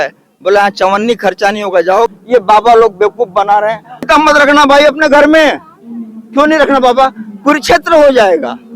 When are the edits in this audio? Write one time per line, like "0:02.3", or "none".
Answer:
0:02.1
0:04.0